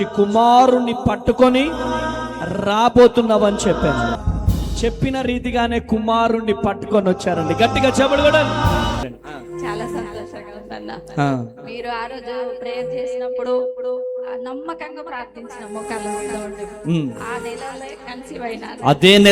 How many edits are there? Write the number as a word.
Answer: two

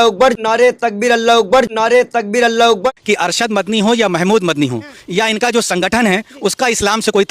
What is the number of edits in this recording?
one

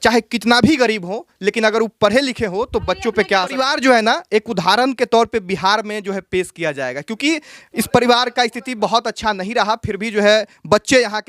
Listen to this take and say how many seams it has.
one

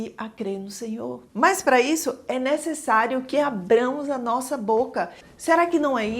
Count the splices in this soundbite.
two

